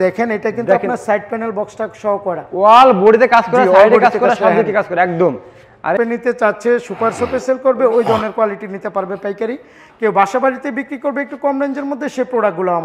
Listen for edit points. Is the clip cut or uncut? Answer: cut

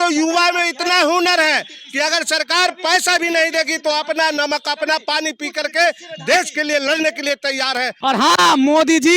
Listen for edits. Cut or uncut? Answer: cut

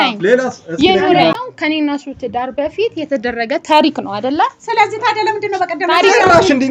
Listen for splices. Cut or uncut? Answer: cut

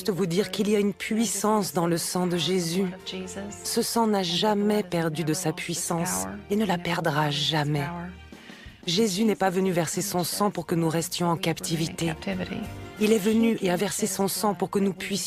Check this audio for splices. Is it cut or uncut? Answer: uncut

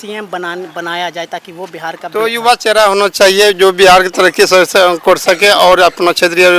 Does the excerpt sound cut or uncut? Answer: uncut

